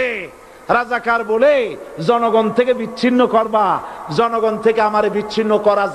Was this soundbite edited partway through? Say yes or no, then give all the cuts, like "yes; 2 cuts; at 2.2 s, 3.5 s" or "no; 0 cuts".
no; 0 cuts